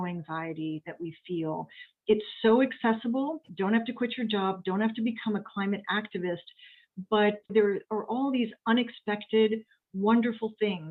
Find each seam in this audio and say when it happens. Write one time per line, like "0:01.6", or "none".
0:03.4
0:07.5